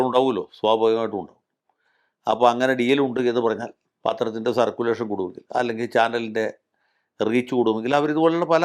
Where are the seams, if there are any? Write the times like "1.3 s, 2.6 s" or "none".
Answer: none